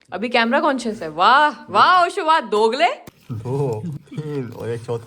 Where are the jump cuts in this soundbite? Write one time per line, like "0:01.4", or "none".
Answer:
0:03.1